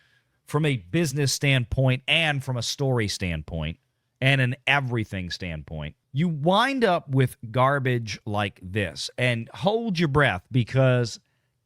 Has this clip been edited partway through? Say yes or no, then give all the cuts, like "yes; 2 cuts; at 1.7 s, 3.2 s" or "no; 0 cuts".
yes; 1 cut; at 6.0 s